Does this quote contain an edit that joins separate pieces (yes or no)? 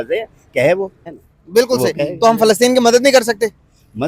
yes